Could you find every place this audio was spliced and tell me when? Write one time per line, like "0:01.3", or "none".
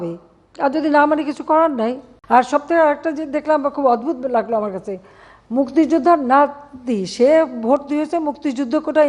0:02.1